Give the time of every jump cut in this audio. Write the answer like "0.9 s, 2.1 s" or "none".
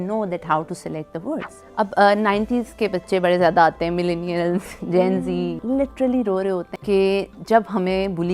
1.6 s, 5.6 s, 6.7 s